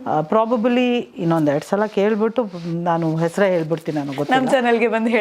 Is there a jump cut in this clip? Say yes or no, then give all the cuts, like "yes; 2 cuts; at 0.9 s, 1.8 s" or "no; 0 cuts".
no; 0 cuts